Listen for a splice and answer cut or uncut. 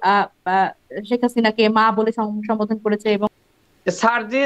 cut